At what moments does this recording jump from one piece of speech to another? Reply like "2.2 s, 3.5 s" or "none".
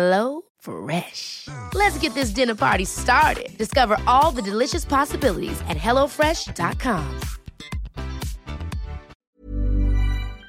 9.3 s